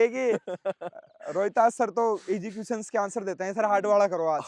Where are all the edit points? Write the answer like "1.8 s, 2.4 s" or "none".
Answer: none